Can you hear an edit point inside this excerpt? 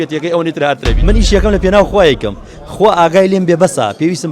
yes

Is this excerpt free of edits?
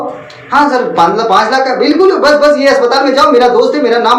yes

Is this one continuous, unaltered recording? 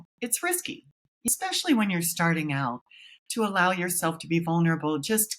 no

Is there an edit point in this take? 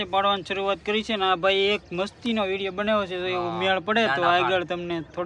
no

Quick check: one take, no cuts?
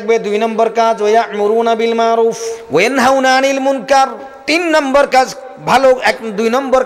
no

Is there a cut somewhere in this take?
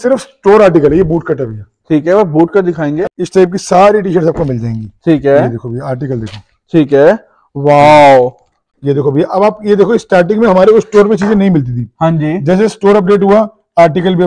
yes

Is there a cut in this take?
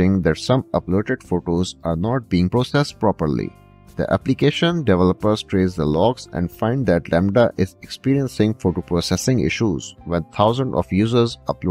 no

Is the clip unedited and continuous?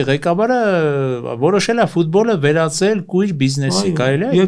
yes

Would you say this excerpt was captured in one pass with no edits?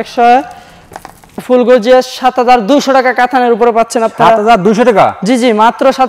no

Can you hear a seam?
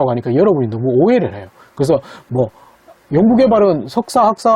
no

